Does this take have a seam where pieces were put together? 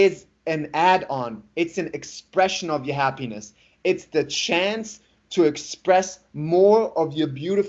no; 0 cuts

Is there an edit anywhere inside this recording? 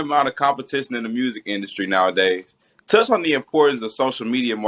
no; 0 cuts

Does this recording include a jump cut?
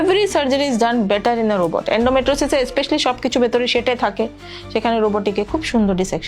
no; 0 cuts

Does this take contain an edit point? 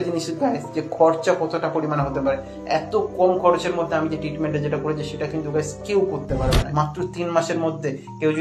yes; 1 cut; at 6.7 s

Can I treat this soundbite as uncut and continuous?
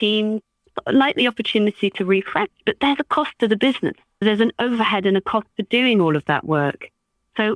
no; 1 cut; at 4.2 s

